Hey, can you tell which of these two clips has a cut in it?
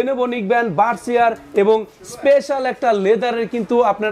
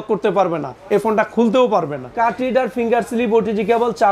second; 1 cut; at 2.0 s

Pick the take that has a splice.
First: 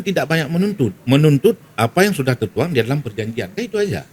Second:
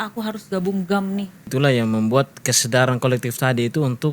second; 1 cut; at 1.5 s

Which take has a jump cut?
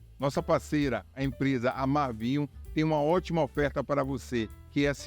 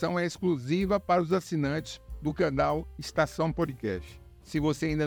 first; 1 cut; at 4.0 s

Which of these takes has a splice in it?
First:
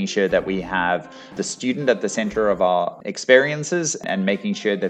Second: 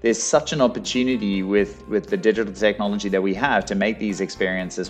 first; 3 cuts; at 1.3 s, 3.0 s, 4.0 s

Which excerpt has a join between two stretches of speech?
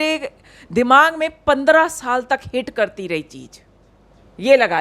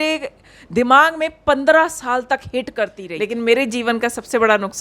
second; 1 cut; at 3.0 s

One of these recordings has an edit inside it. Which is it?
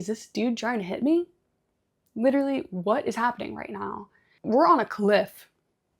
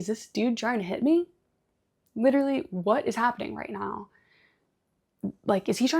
first; 1 cut; at 4.3 s

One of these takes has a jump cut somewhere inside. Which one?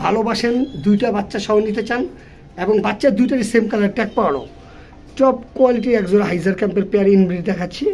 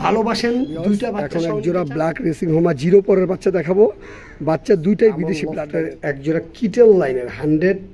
second; 2 cuts; at 1.2 s, 5.5 s

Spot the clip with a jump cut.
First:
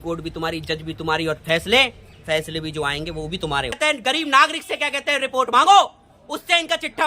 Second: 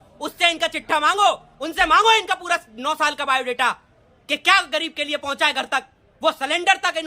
first; 1 cut; at 3.7 s

